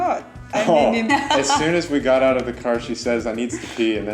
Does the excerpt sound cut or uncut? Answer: cut